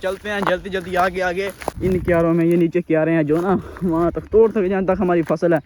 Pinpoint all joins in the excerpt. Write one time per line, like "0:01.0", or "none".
0:01.6